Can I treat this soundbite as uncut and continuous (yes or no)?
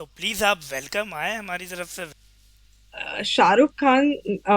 no